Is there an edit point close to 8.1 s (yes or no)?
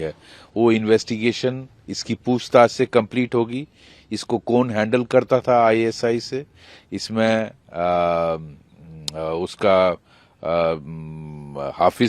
no